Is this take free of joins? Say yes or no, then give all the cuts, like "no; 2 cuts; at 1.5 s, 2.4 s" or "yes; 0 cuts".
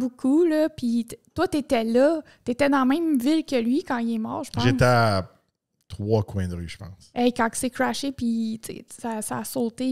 yes; 0 cuts